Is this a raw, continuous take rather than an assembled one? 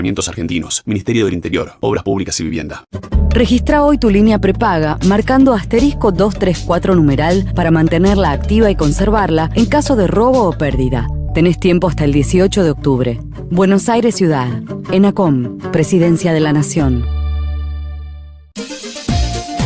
no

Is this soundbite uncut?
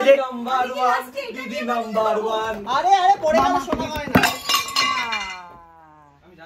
yes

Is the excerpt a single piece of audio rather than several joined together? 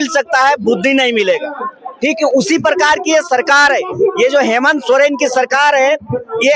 yes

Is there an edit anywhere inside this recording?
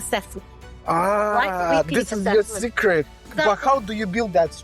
yes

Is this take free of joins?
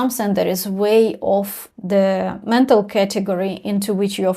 no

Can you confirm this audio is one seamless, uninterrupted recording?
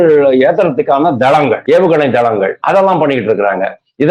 no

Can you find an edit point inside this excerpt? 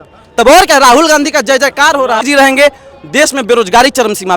yes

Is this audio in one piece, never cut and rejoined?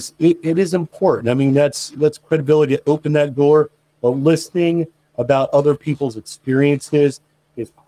yes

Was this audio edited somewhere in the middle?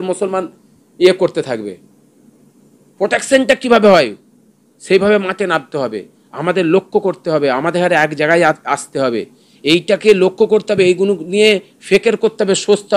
no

